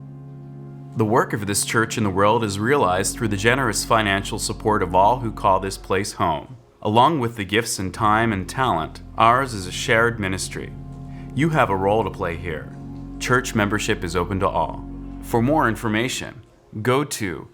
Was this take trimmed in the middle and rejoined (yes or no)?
yes